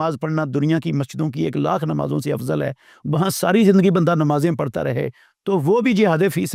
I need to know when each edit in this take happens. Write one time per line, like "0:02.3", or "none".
none